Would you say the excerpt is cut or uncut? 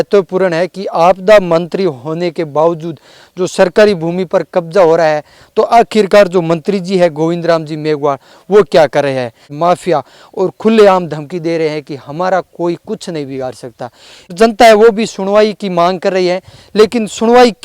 cut